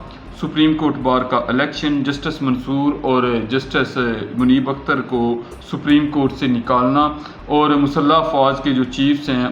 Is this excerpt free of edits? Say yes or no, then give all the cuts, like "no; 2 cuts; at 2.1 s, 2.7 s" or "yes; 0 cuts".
yes; 0 cuts